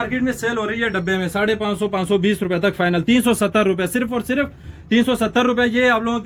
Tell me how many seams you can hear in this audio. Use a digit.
0